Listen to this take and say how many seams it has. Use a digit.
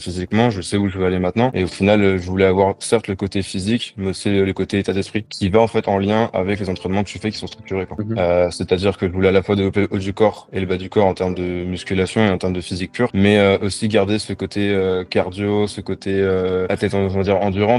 3